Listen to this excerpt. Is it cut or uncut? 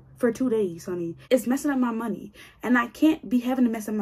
cut